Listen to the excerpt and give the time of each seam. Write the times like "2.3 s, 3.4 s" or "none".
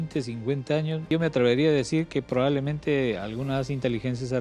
1.1 s